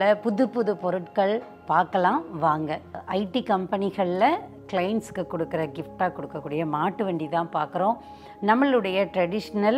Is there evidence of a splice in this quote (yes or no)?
no